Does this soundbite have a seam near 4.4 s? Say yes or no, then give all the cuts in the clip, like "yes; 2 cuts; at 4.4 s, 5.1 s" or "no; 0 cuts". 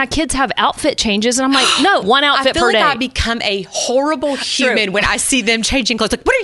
no; 1 cut; at 2.0 s